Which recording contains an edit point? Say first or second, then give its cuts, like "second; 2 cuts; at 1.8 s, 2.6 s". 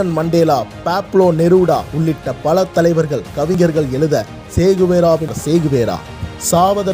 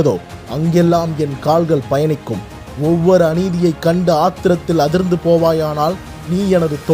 first; 1 cut; at 5.4 s